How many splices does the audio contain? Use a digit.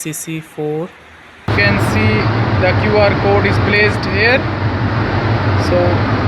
1